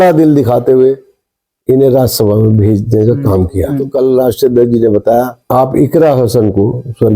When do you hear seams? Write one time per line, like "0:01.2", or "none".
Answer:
0:03.8
0:05.4